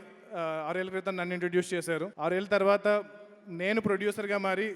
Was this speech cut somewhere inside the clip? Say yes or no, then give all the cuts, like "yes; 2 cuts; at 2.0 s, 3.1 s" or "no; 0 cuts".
yes; 1 cut; at 2.1 s